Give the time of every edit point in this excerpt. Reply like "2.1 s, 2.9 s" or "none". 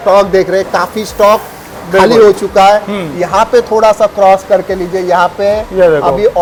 none